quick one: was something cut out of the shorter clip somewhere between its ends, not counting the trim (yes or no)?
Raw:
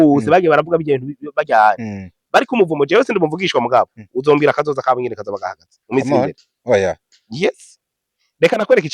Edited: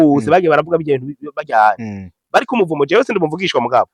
no